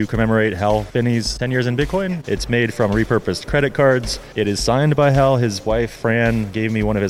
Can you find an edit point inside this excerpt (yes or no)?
yes